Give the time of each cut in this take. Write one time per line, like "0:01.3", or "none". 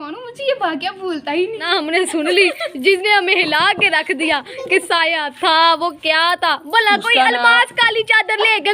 0:01.6